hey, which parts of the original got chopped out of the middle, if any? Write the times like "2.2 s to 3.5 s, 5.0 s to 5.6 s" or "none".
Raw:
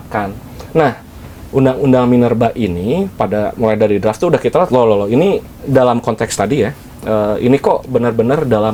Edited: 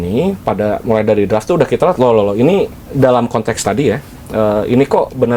none

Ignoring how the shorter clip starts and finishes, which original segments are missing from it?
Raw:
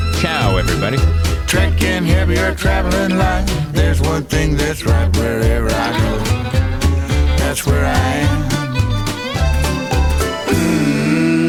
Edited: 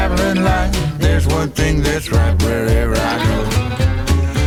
none

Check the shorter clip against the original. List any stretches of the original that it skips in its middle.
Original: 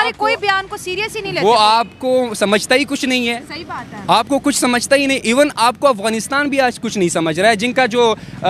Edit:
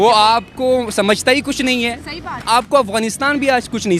3.9 s to 5.5 s

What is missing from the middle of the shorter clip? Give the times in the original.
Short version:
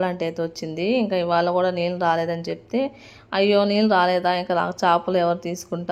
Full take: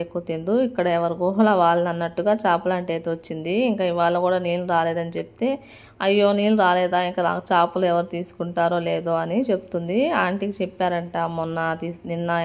none

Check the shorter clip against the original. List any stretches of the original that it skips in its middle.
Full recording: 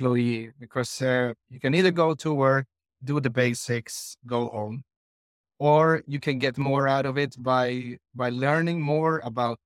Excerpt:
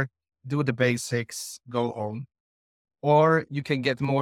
none

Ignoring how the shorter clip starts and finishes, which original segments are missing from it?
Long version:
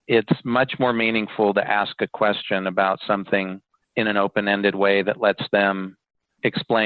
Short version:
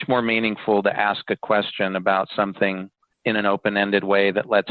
none

